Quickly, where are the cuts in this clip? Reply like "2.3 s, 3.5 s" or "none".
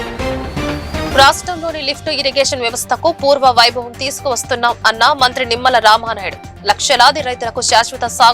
1.1 s